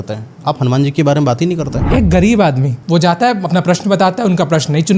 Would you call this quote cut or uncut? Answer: cut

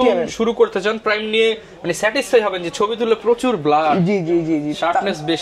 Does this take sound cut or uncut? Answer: uncut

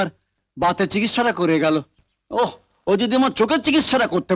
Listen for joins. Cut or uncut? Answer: uncut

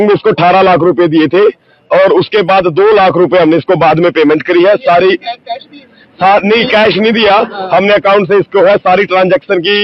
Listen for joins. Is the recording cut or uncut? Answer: uncut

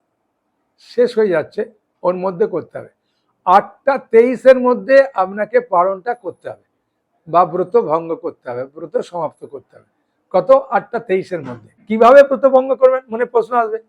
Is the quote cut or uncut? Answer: cut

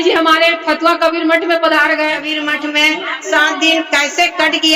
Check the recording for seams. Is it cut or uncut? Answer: cut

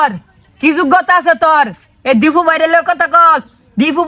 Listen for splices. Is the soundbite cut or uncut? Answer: uncut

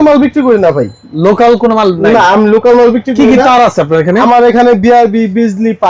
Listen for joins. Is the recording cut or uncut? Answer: uncut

